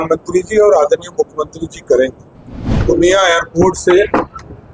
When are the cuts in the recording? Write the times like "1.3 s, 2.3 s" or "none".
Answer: 2.7 s